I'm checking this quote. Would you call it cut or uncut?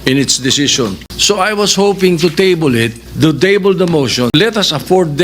cut